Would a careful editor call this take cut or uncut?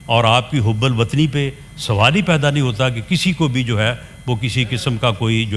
uncut